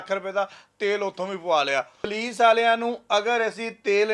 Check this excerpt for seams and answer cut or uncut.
cut